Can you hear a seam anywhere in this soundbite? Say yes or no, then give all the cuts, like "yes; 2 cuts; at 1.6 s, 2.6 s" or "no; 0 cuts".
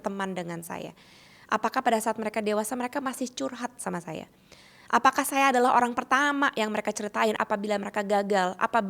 yes; 1 cut; at 7.4 s